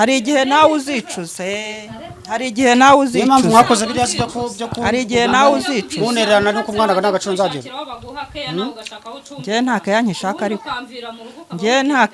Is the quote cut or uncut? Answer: uncut